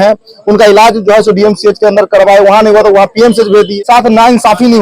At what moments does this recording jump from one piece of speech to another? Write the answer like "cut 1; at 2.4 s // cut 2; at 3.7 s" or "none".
cut 1; at 3.8 s